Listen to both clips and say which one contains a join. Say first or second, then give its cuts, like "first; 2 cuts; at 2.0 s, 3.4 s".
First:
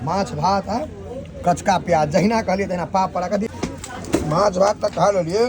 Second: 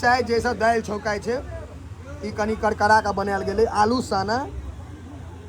first; 1 cut; at 3.5 s